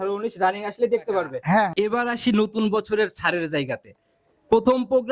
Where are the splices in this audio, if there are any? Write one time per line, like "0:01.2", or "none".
0:01.7